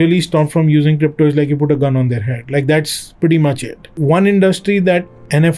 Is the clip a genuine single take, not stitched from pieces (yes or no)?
no